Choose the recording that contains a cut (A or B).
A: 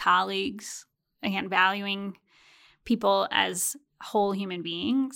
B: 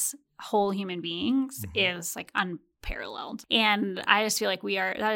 B